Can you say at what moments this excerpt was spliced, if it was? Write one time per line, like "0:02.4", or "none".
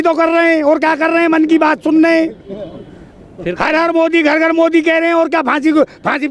none